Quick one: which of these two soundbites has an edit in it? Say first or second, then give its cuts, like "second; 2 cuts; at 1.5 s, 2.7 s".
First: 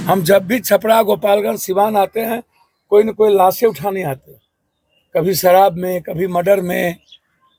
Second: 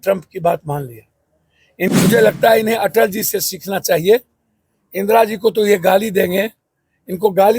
second; 1 cut; at 1.9 s